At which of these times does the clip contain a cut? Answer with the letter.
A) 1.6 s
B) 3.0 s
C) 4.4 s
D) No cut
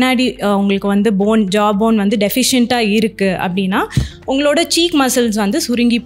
D